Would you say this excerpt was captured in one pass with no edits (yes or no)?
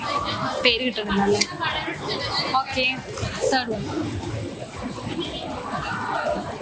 yes